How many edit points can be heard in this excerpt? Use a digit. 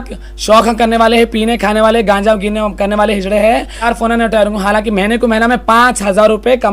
1